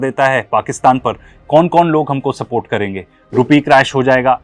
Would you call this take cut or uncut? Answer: uncut